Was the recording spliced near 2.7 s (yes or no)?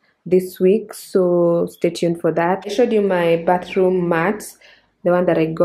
yes